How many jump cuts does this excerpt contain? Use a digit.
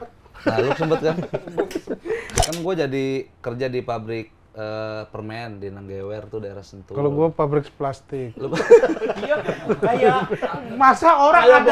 1